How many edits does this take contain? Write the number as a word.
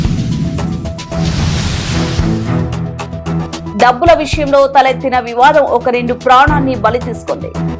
zero